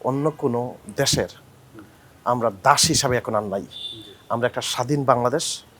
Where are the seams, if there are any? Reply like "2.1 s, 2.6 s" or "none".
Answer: none